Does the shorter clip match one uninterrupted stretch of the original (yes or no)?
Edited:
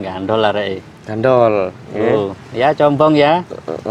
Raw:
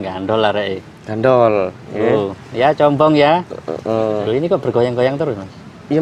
yes